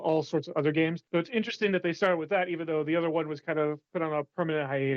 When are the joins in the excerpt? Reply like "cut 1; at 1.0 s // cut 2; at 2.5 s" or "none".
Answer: none